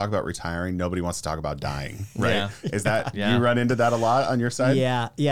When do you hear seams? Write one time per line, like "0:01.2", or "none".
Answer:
none